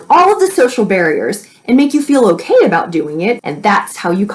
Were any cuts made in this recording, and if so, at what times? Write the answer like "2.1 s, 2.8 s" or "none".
3.4 s